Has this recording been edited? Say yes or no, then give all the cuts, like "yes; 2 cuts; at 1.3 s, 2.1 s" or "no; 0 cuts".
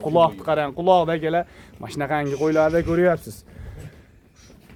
no; 0 cuts